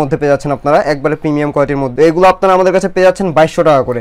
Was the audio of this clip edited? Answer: no; 0 cuts

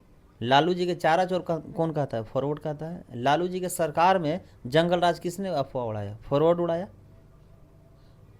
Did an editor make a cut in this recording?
no; 0 cuts

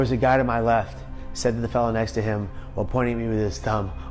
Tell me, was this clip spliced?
no; 0 cuts

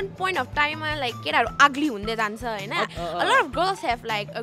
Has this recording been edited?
yes; 1 cut; at 2.9 s

